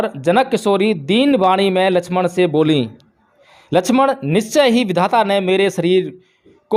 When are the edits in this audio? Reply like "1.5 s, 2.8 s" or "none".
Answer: none